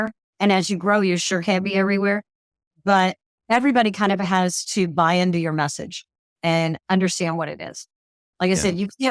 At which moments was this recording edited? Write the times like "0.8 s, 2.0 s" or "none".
6.8 s